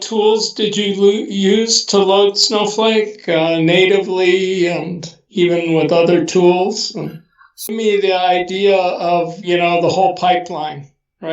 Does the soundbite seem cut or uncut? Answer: cut